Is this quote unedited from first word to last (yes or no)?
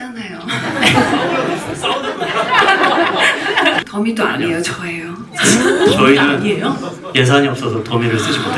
no